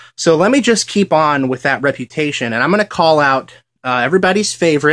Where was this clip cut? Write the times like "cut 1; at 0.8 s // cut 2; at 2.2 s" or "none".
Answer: cut 1; at 3.4 s